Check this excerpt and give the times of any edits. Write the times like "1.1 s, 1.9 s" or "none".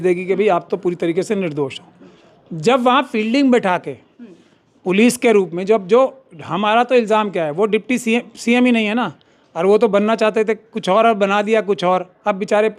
none

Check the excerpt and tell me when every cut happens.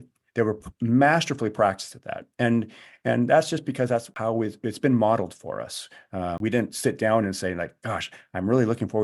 4.1 s, 6.4 s

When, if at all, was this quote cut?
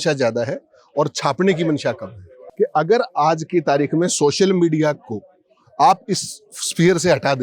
2.4 s

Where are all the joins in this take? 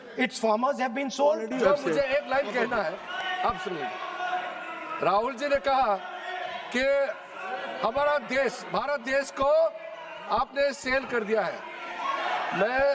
1.7 s

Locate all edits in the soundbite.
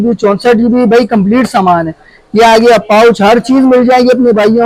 none

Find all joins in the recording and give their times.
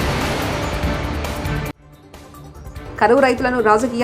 1.7 s

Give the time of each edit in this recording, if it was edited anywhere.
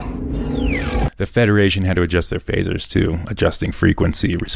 none

